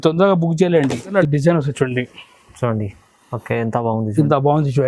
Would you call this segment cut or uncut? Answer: cut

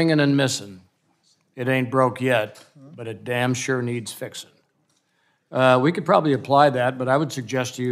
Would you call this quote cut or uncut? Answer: uncut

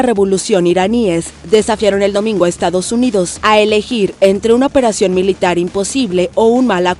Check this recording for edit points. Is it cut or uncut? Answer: uncut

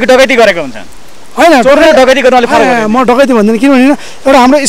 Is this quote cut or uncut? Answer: uncut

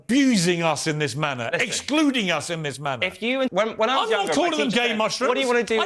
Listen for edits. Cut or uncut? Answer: cut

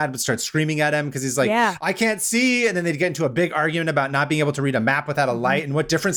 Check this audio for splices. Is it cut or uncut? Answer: uncut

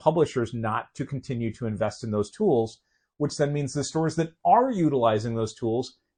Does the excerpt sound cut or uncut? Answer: uncut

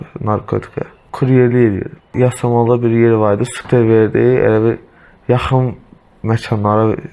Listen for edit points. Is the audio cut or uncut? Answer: cut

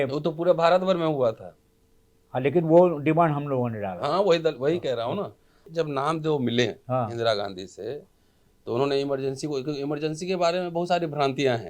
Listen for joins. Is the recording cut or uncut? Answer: cut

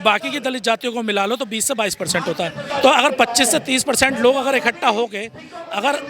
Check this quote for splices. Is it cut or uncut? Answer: cut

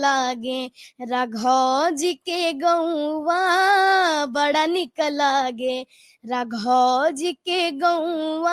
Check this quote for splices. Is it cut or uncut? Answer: uncut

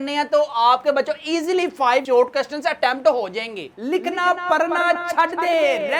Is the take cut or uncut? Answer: cut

